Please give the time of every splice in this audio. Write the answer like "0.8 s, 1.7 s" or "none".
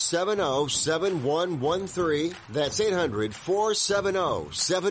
2.4 s